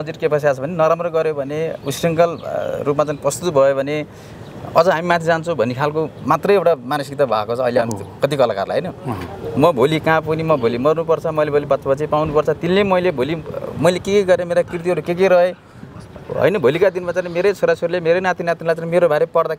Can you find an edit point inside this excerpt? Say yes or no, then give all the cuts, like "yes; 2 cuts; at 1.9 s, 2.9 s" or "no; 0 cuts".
no; 0 cuts